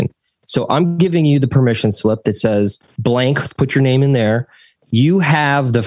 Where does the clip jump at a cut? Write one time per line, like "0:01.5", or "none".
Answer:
0:02.9